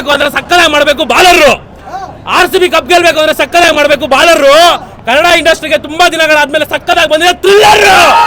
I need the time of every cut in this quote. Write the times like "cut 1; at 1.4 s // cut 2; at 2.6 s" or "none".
none